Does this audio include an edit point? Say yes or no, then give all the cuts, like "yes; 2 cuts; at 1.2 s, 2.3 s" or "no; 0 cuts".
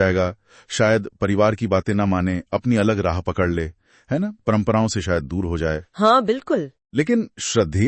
no; 0 cuts